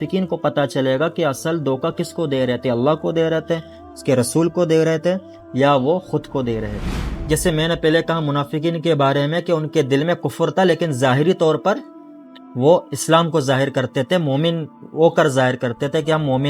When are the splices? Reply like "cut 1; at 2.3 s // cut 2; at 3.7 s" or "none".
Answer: cut 1; at 7.1 s

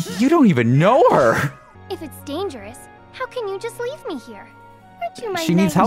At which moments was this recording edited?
cut 1; at 1.7 s

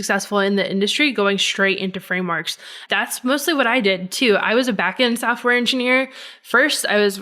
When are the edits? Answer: cut 1; at 2.8 s

